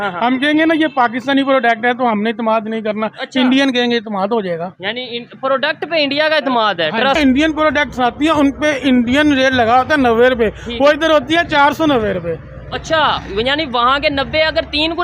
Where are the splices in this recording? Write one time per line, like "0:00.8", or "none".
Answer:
0:07.2